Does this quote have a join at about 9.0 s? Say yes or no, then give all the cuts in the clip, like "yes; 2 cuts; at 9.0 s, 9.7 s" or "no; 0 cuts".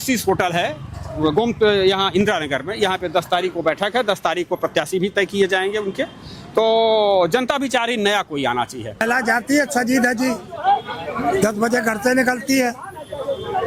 yes; 1 cut; at 9.0 s